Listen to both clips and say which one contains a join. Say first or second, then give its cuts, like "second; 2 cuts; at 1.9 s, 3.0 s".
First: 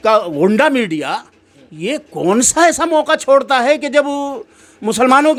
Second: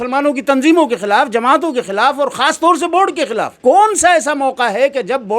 second; 1 cut; at 3.5 s